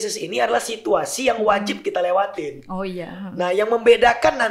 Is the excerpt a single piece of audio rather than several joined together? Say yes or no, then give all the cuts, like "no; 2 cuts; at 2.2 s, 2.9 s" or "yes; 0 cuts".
yes; 0 cuts